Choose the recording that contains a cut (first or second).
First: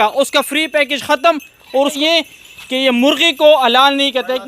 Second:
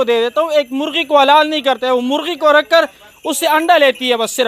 first